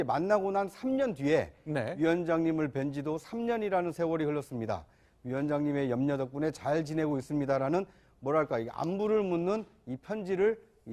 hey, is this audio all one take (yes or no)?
no